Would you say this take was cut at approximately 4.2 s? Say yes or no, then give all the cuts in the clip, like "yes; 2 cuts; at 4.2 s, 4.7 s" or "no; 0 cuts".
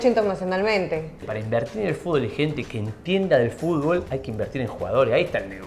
yes; 2 cuts; at 1.3 s, 4.2 s